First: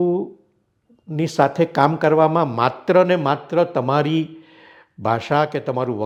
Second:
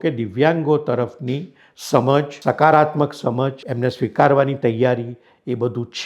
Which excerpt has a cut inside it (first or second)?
second